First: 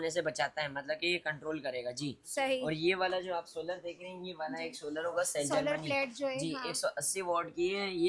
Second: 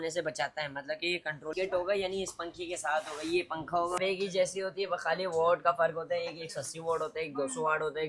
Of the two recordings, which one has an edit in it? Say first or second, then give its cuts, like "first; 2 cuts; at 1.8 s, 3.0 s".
second; 2 cuts; at 1.5 s, 4.0 s